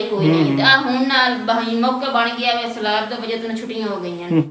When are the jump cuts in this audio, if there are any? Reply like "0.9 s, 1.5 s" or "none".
none